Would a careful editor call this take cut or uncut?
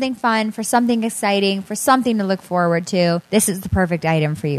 uncut